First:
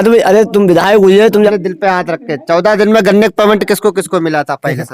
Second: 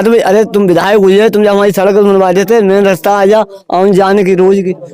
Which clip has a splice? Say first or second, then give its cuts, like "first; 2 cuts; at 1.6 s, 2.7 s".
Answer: first; 1 cut; at 1.5 s